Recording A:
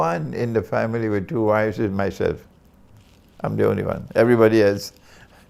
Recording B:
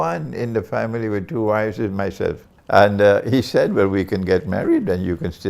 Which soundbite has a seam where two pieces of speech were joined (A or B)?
B